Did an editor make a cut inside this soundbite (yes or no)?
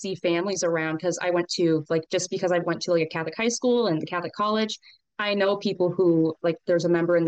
no